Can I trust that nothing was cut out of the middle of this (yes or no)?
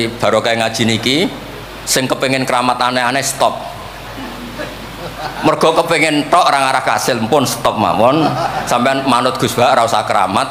yes